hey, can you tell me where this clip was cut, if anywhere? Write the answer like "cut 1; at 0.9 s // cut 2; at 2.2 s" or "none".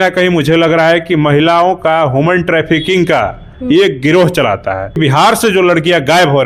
cut 1; at 5.0 s